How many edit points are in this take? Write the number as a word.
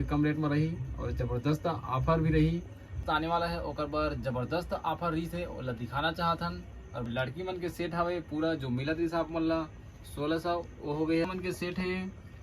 three